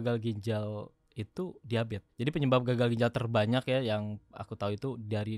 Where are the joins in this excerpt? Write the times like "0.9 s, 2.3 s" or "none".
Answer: 2.0 s